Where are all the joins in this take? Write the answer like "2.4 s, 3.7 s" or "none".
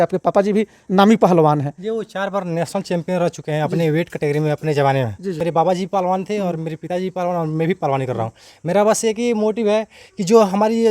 5.4 s